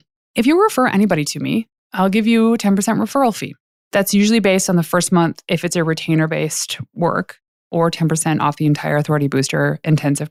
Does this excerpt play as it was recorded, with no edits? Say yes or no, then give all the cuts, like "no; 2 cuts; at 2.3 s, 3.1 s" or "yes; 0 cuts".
yes; 0 cuts